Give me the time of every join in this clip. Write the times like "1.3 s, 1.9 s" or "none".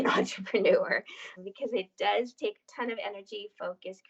1.3 s